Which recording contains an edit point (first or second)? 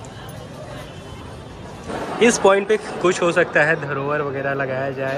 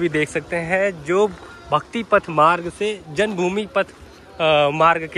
first